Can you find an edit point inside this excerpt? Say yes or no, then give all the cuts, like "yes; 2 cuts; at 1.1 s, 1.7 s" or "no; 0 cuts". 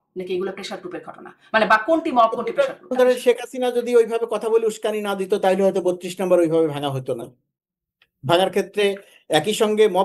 yes; 1 cut; at 2.9 s